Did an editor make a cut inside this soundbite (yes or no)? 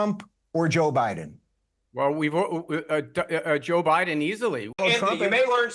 yes